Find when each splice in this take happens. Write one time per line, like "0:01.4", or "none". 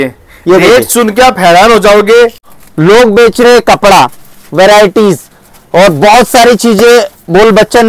0:02.4